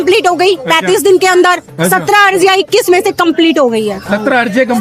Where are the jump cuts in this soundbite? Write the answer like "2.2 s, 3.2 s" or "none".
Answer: none